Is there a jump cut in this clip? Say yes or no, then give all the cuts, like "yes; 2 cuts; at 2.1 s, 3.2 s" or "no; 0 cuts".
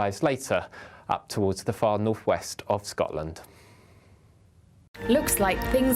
yes; 1 cut; at 4.9 s